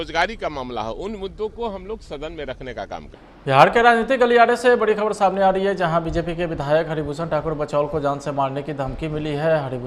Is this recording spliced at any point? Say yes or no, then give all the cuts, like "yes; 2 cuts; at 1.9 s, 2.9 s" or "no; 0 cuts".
yes; 1 cut; at 3.3 s